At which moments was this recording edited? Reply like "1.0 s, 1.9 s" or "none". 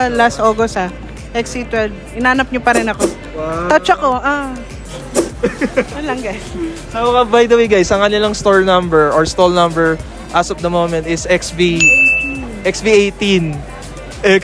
none